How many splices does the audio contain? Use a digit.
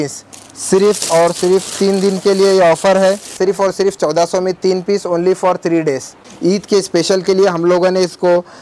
2